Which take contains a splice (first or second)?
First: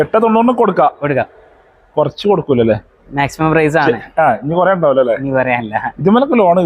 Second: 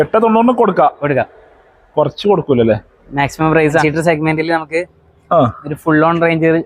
second